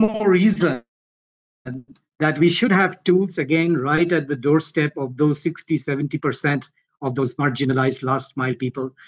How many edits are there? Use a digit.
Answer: 0